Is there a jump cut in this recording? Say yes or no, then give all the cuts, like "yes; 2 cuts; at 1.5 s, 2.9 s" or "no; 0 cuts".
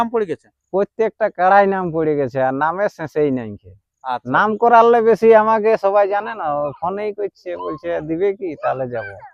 no; 0 cuts